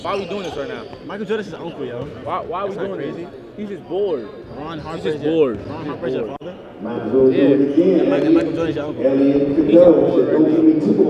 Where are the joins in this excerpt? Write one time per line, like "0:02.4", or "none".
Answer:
none